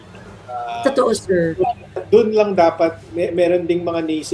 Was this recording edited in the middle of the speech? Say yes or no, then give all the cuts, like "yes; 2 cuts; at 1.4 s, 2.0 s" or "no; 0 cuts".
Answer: yes; 1 cut; at 3.0 s